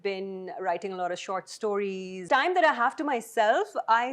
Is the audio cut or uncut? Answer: cut